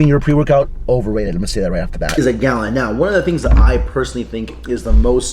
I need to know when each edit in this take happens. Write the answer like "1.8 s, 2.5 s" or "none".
2.2 s